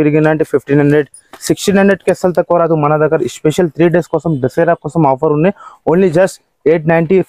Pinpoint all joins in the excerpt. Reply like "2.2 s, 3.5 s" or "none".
none